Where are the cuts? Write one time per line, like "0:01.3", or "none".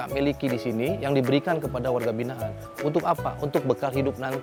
none

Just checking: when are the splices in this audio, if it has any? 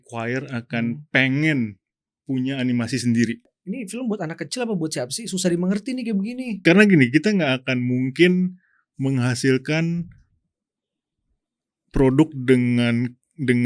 0:03.5
0:06.6

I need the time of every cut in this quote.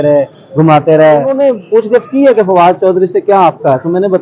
0:01.3

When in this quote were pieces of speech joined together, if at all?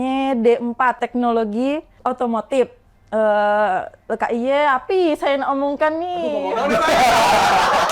0:01.0
0:01.9

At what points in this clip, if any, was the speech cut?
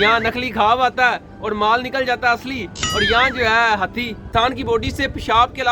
0:04.2

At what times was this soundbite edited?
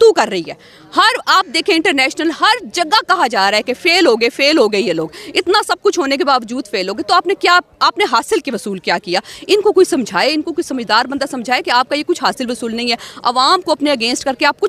none

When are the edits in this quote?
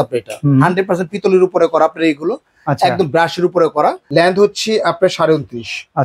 0:04.0

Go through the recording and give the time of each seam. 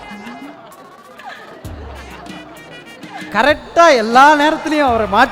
0:03.3

